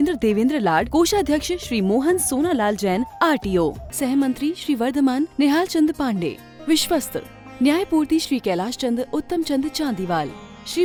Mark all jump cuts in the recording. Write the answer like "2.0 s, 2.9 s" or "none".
none